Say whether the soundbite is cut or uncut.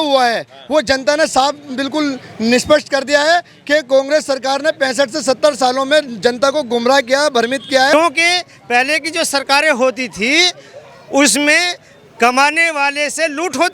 cut